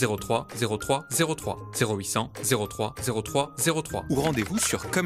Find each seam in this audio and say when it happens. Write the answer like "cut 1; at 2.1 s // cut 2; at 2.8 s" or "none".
cut 1; at 4.0 s